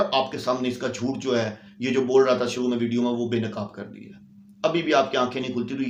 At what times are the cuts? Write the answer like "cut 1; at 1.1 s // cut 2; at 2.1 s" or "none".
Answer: none